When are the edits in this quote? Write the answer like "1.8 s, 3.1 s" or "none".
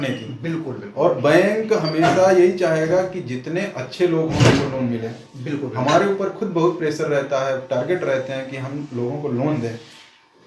none